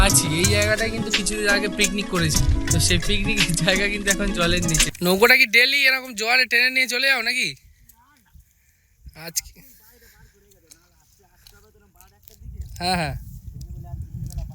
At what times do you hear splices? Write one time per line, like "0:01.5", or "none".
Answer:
0:02.3
0:04.9